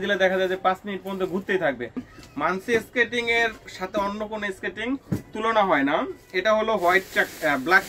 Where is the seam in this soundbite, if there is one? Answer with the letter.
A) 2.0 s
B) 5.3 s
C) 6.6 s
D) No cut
A